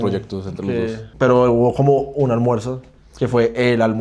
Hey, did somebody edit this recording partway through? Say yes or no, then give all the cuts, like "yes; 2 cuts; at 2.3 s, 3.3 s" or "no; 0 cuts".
yes; 1 cut; at 1.1 s